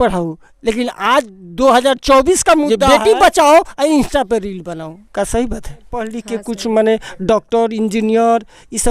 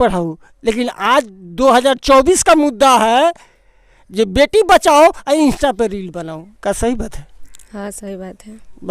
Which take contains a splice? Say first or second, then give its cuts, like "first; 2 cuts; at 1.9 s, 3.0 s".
first; 2 cuts; at 2.8 s, 6.2 s